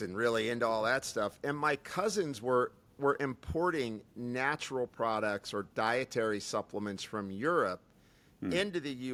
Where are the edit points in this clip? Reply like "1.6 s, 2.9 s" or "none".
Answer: none